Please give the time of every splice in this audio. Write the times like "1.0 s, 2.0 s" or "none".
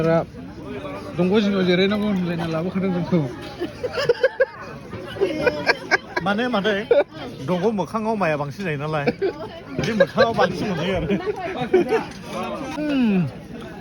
12.7 s

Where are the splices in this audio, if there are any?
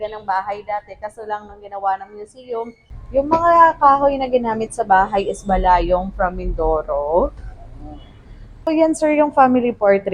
2.8 s, 8.7 s

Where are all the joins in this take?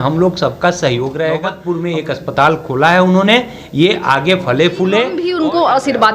1.5 s, 5.2 s

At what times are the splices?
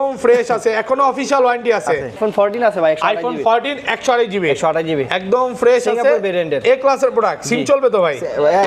2.2 s

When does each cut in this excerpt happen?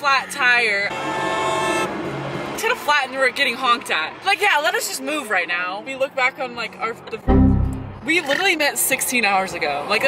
0.9 s, 2.6 s, 5.9 s

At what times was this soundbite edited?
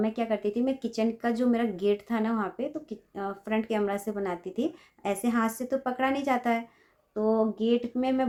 none

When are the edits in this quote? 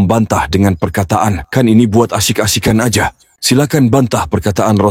3.3 s

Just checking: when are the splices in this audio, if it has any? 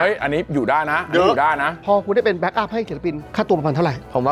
1.8 s

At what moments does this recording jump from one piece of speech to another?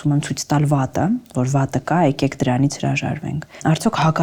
none

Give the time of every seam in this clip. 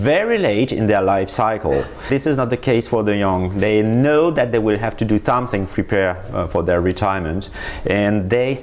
none

